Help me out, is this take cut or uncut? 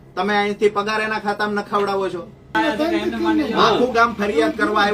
cut